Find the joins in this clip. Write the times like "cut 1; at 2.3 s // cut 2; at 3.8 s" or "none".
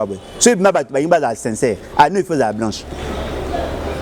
none